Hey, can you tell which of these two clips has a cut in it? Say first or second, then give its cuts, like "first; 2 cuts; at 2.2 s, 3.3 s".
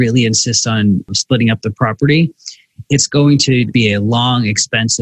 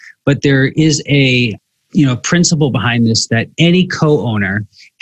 first; 2 cuts; at 1.1 s, 3.7 s